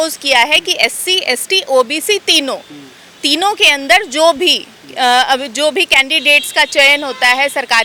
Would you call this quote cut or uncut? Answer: uncut